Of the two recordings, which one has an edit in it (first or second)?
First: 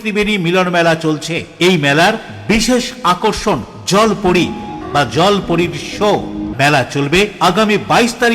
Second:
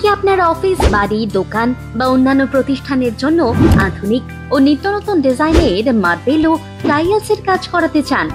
first